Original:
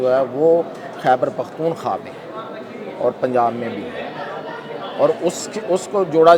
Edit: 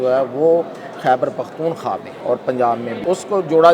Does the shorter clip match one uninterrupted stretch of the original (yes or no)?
no